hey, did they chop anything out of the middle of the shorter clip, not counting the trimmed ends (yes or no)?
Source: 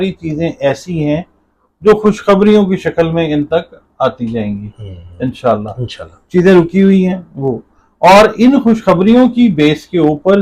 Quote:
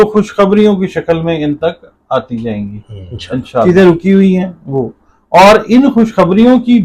yes